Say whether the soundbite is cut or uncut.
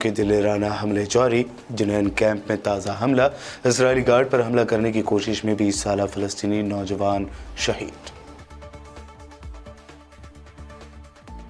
uncut